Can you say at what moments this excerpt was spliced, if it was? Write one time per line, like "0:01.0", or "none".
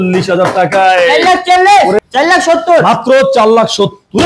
0:02.0